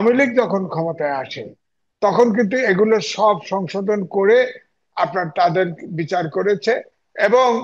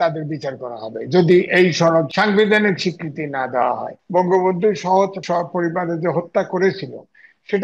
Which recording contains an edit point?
second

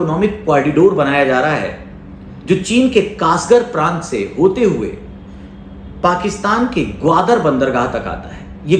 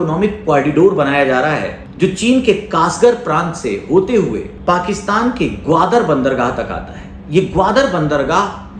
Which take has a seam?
second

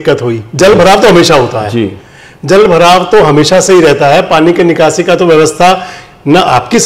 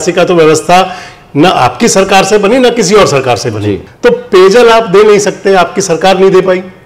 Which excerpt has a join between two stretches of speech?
second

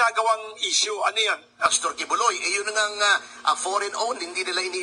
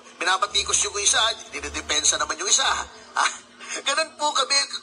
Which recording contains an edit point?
first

